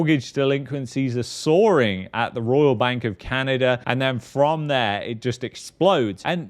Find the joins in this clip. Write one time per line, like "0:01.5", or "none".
0:03.8